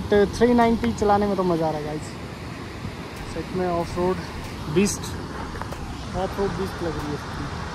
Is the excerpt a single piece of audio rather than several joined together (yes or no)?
yes